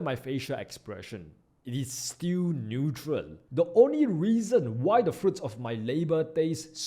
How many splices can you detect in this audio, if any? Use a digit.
1